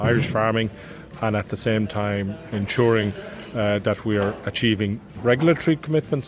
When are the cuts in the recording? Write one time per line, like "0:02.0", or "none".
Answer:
0:05.1